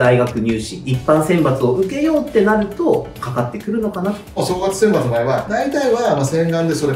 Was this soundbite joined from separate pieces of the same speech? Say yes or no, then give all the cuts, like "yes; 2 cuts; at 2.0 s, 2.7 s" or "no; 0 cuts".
yes; 2 cuts; at 4.4 s, 5.5 s